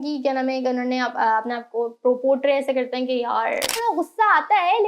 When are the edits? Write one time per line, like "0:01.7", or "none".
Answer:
0:03.8